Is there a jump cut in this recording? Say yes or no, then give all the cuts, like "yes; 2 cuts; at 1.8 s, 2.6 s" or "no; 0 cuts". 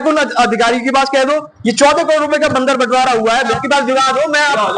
yes; 1 cut; at 3.5 s